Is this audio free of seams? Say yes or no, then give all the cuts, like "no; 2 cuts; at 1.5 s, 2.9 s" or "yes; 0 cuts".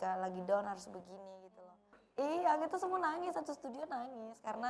no; 1 cut; at 2.0 s